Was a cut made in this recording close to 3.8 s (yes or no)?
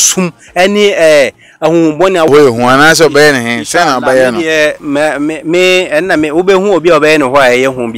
no